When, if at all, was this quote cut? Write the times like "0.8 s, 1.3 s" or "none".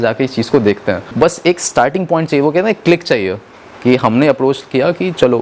1.1 s